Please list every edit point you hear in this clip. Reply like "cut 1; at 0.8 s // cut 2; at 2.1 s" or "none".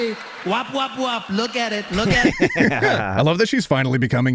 cut 1; at 3.1 s